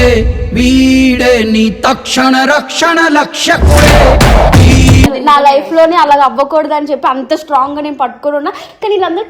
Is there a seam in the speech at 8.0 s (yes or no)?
no